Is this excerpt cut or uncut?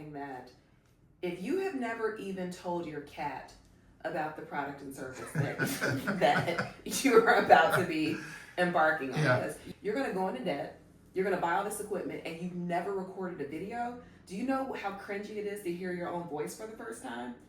cut